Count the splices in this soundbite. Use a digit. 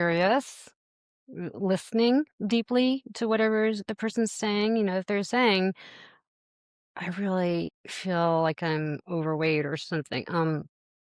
1